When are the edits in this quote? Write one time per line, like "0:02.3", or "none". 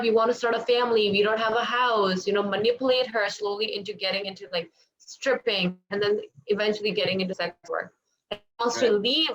none